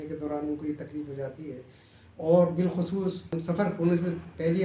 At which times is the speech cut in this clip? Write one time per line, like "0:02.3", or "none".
0:03.3